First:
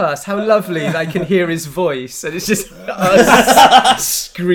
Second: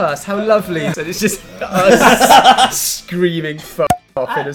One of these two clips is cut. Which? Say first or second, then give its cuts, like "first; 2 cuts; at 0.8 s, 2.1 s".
second; 1 cut; at 0.9 s